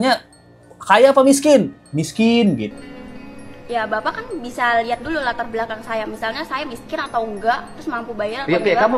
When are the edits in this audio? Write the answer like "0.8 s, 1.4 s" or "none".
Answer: none